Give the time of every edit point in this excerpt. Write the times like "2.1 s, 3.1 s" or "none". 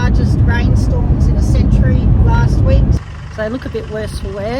3.0 s